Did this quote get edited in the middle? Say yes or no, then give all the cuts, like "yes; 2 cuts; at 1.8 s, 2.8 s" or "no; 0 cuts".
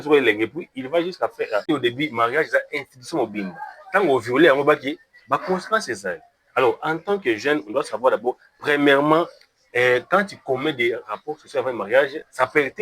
yes; 1 cut; at 1.7 s